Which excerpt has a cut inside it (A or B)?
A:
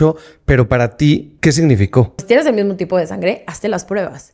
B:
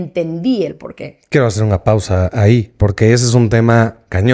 A